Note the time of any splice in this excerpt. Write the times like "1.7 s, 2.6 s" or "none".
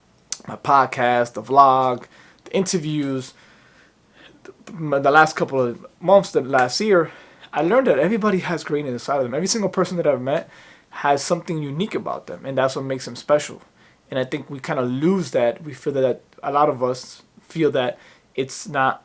none